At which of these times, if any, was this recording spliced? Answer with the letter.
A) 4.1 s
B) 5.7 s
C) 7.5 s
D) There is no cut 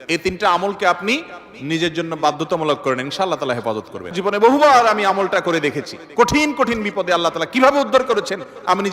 A